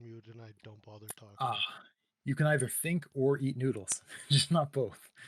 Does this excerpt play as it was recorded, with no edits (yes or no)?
yes